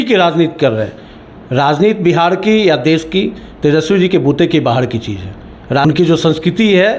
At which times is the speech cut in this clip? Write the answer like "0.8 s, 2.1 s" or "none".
5.9 s